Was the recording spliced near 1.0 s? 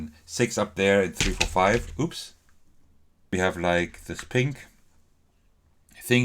no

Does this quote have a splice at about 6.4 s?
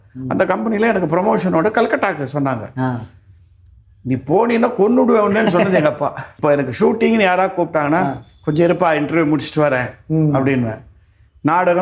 yes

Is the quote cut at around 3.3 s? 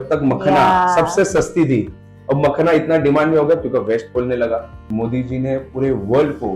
no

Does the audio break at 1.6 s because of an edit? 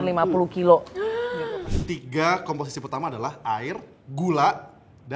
yes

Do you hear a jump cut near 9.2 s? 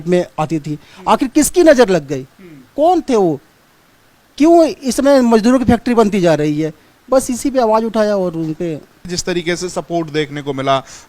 yes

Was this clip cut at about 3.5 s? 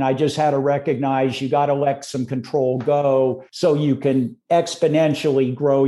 yes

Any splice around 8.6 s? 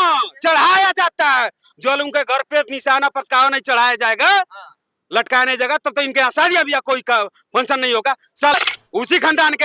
yes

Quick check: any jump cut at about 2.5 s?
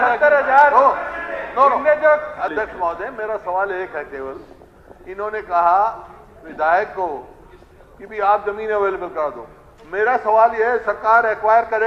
yes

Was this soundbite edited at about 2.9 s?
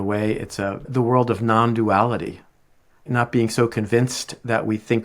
yes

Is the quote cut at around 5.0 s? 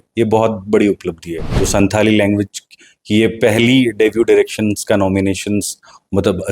no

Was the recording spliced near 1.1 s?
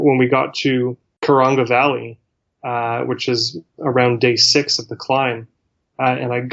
yes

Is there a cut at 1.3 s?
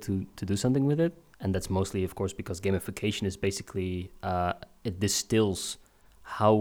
yes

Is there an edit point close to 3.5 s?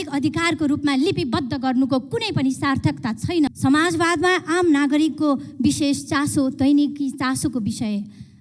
yes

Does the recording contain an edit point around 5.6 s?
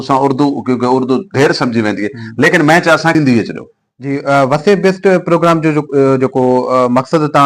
no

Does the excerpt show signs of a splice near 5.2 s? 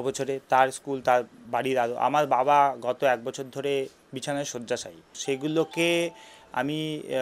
yes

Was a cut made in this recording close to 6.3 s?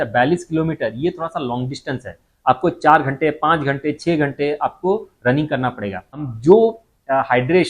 yes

